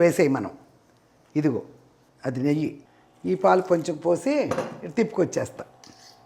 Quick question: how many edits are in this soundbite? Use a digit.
1